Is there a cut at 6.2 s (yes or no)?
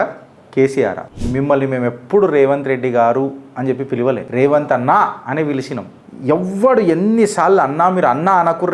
no